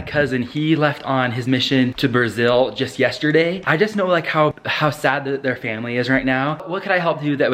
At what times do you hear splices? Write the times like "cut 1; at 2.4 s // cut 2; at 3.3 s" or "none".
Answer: cut 1; at 3.6 s // cut 2; at 6.6 s

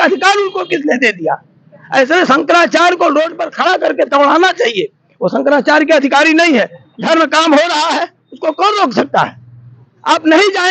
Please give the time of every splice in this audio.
cut 1; at 6.8 s

